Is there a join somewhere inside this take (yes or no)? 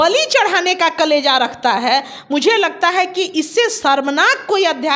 no